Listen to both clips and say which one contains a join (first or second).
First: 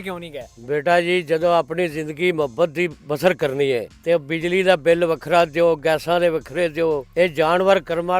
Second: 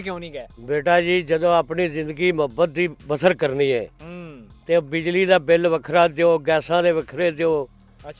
first